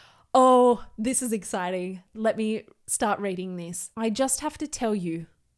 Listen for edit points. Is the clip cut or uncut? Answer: cut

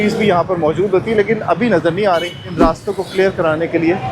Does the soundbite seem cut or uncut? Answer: cut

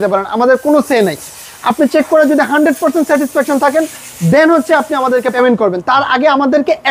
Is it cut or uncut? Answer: cut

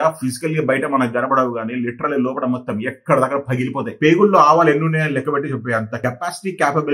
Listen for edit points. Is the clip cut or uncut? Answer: cut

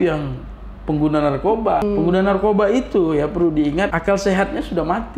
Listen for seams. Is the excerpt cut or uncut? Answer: cut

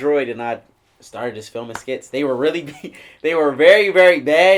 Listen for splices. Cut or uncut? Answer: uncut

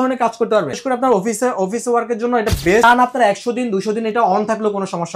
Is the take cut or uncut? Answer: cut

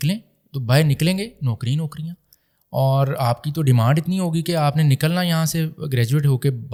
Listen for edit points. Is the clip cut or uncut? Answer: uncut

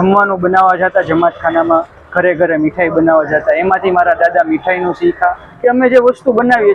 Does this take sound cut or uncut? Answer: cut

